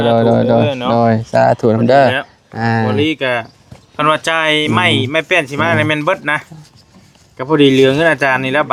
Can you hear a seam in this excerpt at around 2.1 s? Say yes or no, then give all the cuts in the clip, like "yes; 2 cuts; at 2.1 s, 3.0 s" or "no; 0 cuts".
no; 0 cuts